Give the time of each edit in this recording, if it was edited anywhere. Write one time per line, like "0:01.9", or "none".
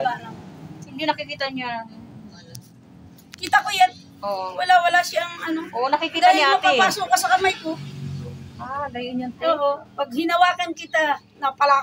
none